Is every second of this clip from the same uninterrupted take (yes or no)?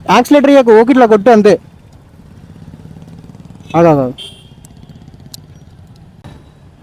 yes